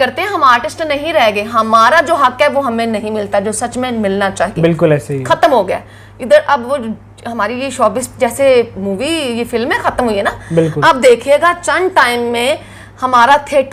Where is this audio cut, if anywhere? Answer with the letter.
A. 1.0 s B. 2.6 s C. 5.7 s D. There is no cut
D